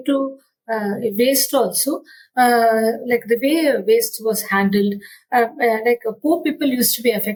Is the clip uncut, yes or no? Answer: yes